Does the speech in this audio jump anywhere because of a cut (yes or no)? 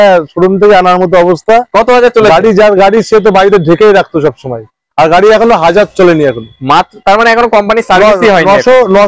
no